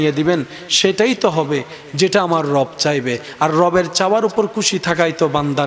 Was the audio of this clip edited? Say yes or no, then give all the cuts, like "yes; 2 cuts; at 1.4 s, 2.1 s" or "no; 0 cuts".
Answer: no; 0 cuts